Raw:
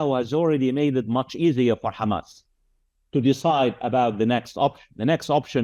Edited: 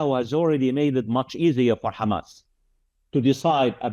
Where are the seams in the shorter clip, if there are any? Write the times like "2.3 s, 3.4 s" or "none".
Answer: none